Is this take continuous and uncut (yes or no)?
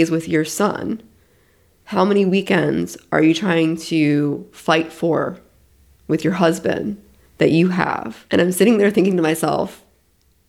no